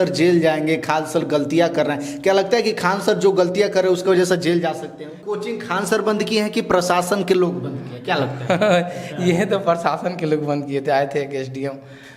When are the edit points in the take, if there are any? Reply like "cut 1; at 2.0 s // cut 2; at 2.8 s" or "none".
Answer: cut 1; at 5.2 s